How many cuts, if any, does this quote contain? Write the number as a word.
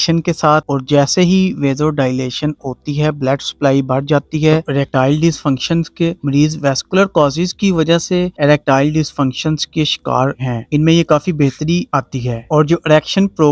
zero